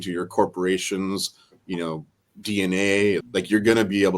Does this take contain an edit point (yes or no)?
yes